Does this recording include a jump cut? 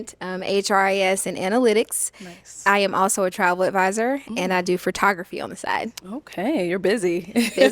no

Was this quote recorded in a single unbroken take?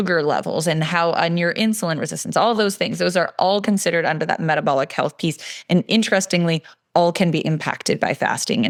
yes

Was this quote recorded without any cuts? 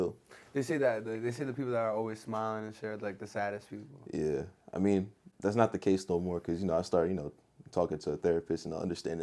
yes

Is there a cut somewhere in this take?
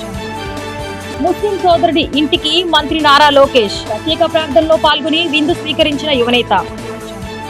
yes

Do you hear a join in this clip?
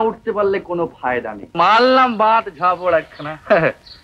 yes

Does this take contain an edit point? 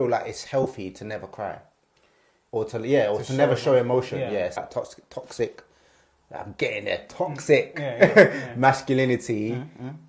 yes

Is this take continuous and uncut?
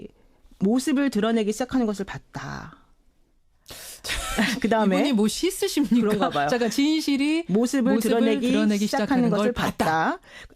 no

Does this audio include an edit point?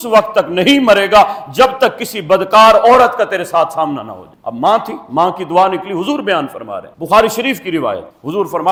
no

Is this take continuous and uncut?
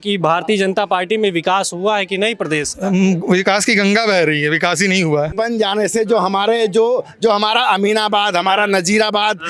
no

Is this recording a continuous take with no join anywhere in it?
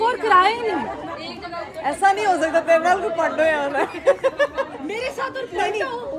yes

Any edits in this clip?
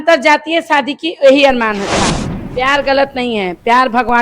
yes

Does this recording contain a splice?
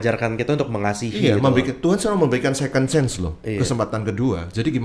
no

